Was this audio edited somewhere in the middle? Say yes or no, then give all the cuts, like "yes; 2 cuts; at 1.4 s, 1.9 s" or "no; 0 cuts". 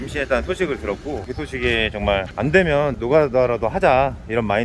no; 0 cuts